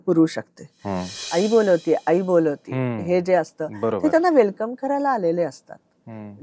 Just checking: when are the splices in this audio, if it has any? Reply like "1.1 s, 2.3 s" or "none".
1.2 s